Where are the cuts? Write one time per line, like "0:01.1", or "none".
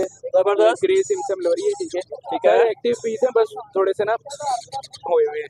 none